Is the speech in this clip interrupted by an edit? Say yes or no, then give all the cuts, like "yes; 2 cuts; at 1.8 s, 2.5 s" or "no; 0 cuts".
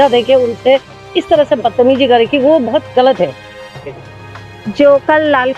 yes; 1 cut; at 3.9 s